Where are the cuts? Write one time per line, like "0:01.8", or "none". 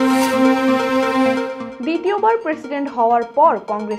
none